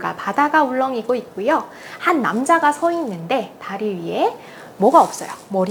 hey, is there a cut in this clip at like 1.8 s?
no; 0 cuts

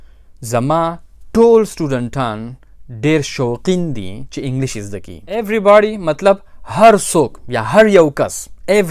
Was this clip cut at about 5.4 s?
yes; 1 cut; at 5.4 s

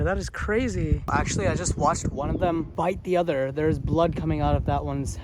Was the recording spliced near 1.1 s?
yes; 2 cuts; at 1.1 s, 2.7 s

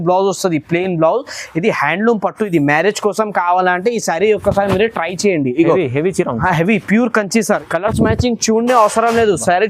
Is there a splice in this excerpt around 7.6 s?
yes; 1 cut; at 7.6 s

